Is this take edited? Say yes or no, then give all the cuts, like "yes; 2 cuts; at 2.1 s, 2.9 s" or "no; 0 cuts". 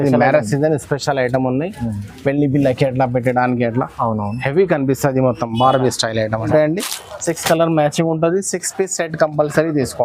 yes; 1 cut; at 6.5 s